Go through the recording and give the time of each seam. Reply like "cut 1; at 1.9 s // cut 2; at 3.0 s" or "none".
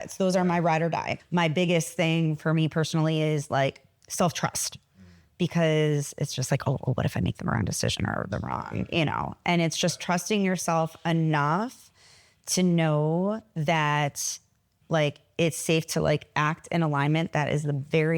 cut 1; at 1.2 s

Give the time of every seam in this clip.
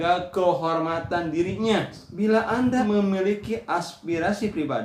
cut 1; at 2.0 s // cut 2; at 2.8 s

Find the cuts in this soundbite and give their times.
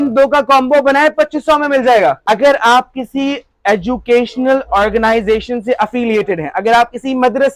cut 1; at 2.2 s

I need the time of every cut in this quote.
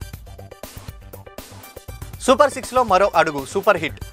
cut 1; at 2.1 s

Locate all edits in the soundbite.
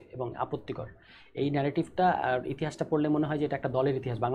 none

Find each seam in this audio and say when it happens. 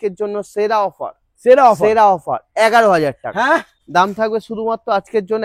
cut 1; at 3.7 s

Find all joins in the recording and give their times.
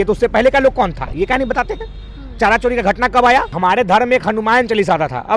cut 1; at 3.5 s

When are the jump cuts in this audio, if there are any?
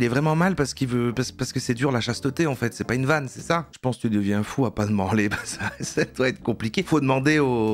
cut 1; at 3.8 s

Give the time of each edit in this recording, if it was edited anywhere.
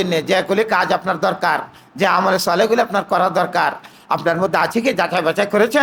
none

